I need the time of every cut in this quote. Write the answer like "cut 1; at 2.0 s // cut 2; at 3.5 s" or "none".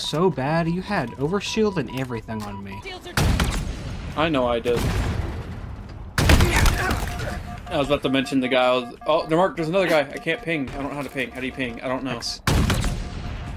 cut 1; at 2.9 s